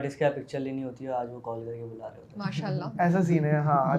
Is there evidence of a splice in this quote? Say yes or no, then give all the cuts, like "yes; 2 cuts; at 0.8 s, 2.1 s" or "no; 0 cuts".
no; 0 cuts